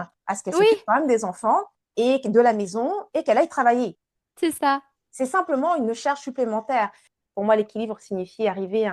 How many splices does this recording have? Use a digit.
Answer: 1